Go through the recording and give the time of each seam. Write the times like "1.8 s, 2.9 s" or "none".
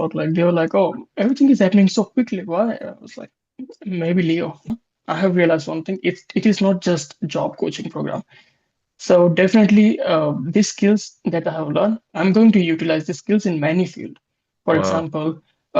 4.9 s

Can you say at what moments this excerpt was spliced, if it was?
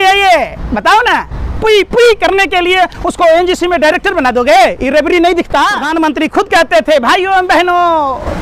5.8 s

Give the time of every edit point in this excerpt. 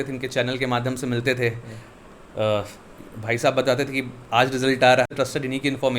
5.1 s

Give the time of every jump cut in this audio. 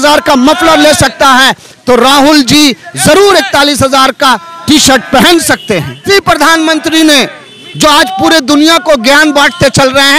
6.1 s

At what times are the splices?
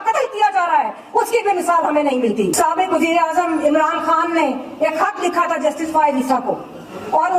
2.5 s

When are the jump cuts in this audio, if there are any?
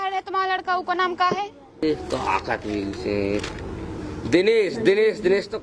1.8 s

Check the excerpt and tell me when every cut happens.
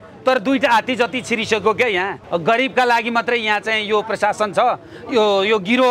2.2 s

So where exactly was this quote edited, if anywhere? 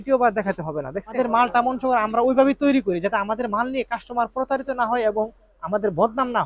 1.1 s

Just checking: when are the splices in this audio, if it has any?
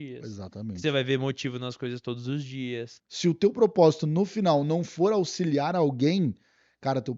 3.0 s

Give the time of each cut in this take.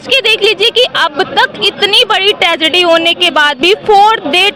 none

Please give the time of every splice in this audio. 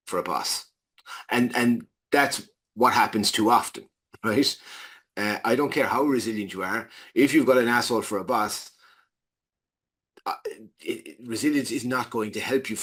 none

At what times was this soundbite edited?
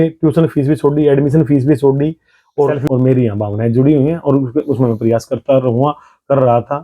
2.8 s

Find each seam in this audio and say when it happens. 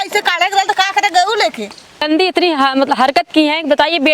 2.1 s

